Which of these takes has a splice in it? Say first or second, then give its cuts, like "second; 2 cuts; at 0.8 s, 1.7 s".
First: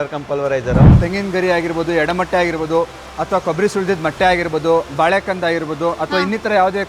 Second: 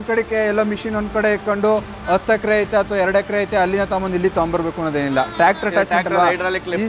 first; 1 cut; at 1.0 s